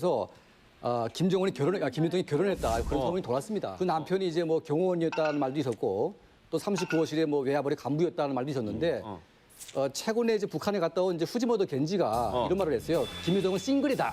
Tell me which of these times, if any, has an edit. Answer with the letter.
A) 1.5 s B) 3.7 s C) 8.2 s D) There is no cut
B